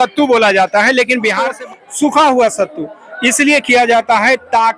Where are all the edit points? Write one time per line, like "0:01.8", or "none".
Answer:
0:01.5